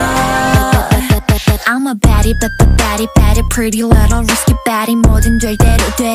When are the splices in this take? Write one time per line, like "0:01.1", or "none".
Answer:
none